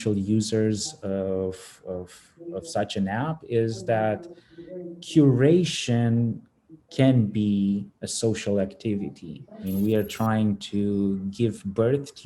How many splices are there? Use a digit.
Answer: 1